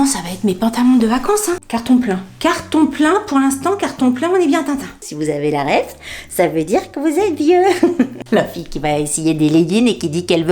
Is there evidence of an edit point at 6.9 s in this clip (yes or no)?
no